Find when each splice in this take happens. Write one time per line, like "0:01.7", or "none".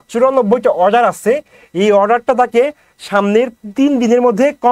none